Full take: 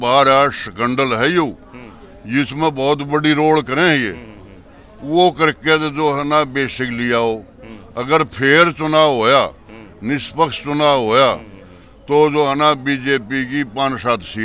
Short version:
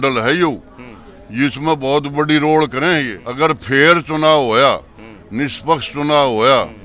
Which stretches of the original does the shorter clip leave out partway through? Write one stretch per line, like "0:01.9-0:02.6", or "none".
0:04.1-0:07.9